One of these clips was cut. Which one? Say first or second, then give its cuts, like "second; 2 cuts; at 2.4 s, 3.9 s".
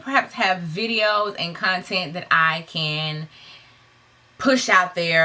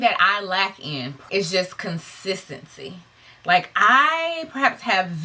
second; 1 cut; at 1.2 s